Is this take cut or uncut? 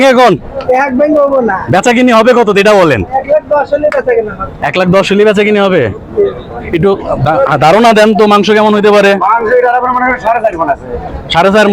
cut